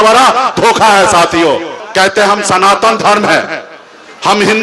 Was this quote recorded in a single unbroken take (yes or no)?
no